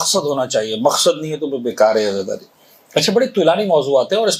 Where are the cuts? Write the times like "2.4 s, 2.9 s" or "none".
none